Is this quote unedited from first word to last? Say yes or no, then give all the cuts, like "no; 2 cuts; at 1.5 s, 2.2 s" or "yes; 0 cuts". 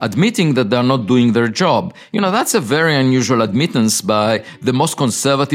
yes; 0 cuts